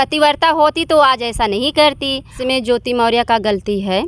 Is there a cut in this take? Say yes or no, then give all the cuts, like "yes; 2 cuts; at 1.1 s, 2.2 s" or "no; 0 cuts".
yes; 1 cut; at 2.4 s